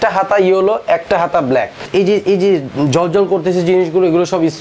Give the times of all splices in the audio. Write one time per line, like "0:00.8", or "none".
0:01.9